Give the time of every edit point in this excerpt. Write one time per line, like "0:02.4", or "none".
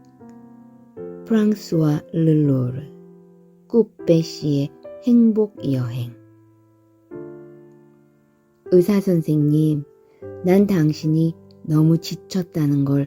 0:06.2
0:08.7